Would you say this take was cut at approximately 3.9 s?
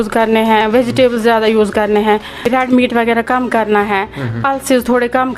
no; 1 cut; at 2.5 s

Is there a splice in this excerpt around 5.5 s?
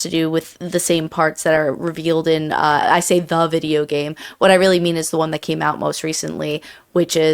no; 1 cut; at 2.8 s

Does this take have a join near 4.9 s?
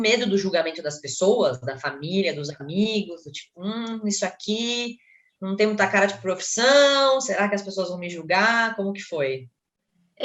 no; 0 cuts

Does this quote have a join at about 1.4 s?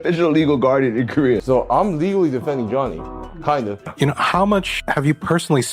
yes; 2 cuts; at 1.4 s, 3.8 s

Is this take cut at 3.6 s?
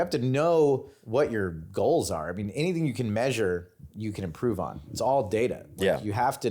no; 2 cuts; at 0.9 s, 4.9 s

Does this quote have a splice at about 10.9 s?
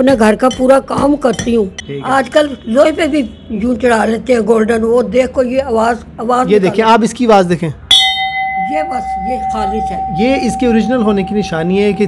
no; 1 cut; at 1.9 s

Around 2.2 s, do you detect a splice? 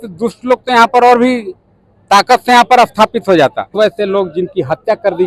no; 1 cut; at 3.7 s

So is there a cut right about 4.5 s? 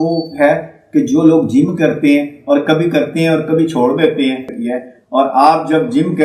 yes; 1 cut; at 4.5 s

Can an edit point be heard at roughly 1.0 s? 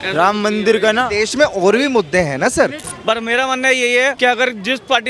no; 2 cuts; at 2.9 s, 4.2 s

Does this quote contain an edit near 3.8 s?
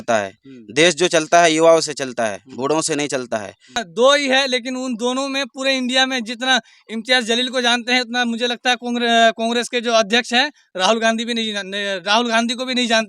yes; 1 cut; at 3.8 s

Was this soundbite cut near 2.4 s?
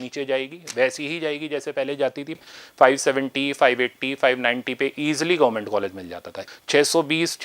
yes; 2 cuts; at 2.4 s, 6.4 s

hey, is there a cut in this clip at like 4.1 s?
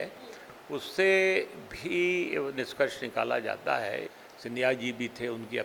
yes; 1 cut; at 4.1 s

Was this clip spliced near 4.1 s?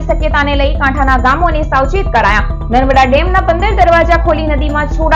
no; 0 cuts

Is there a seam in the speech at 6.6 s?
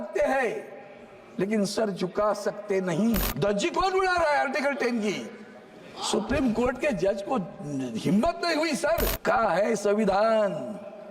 no; 2 cuts; at 3.3 s, 9.2 s

